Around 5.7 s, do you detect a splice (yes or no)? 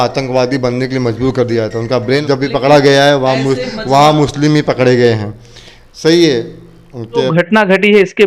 no